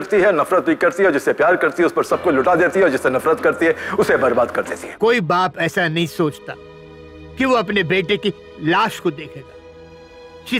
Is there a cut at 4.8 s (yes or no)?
yes